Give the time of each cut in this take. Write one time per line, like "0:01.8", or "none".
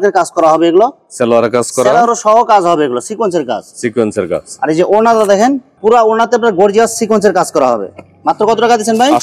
none